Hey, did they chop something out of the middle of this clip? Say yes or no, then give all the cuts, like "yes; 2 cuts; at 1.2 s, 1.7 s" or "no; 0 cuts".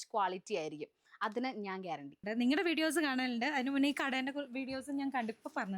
yes; 1 cut; at 2.2 s